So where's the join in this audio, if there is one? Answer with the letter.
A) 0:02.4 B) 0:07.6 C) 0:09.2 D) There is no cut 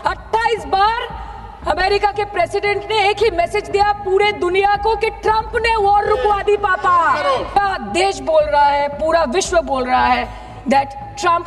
B